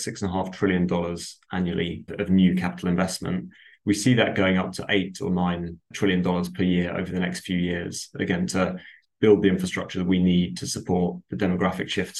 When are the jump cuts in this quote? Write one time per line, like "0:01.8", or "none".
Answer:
none